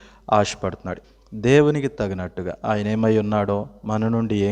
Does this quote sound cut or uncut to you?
cut